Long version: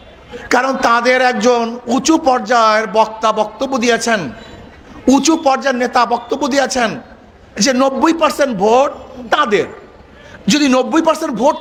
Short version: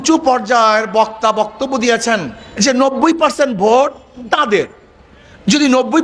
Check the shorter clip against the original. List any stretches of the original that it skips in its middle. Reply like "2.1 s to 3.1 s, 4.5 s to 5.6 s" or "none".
4.4 s to 7.4 s